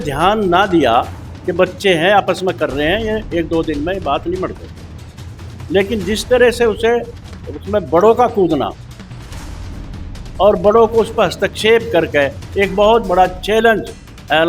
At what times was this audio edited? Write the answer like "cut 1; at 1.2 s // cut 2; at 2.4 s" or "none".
none